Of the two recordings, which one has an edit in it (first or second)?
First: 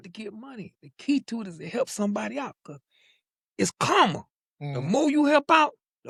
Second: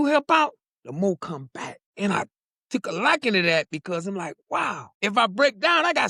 second